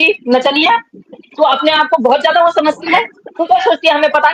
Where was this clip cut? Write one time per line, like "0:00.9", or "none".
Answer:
none